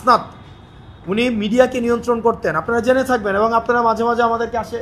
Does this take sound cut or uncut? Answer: uncut